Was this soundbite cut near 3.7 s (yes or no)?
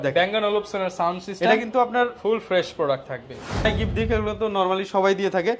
yes